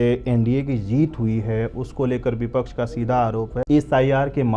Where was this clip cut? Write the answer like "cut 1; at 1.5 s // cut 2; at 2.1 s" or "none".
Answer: cut 1; at 3.6 s